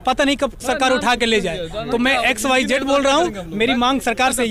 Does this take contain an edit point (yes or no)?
no